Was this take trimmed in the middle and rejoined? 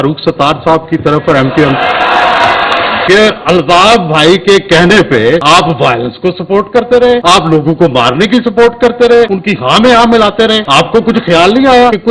no; 0 cuts

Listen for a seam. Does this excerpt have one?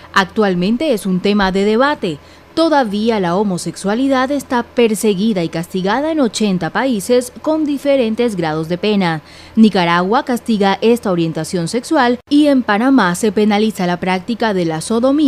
yes; 1 cut; at 6.3 s

